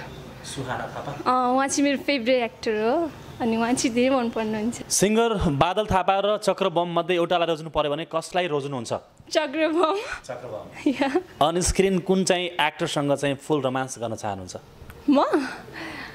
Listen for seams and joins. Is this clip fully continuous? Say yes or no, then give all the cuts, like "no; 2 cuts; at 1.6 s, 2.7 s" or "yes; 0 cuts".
no; 2 cuts; at 4.8 s, 11.3 s